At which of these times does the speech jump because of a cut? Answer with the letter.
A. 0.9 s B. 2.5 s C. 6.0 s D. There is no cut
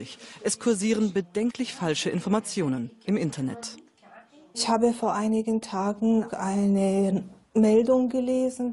B